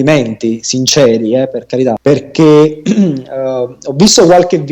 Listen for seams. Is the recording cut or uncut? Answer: cut